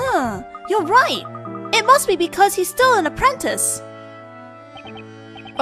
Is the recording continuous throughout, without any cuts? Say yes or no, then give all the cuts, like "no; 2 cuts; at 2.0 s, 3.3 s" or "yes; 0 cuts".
no; 1 cut; at 2.2 s